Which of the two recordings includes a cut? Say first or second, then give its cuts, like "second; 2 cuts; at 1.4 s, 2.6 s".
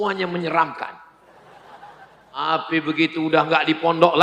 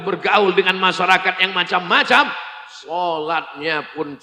first; 1 cut; at 2.4 s